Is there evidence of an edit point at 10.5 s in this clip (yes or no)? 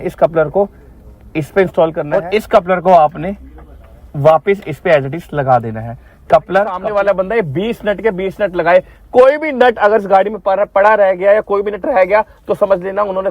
no